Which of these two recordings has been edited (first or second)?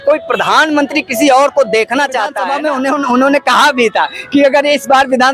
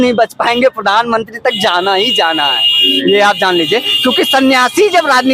first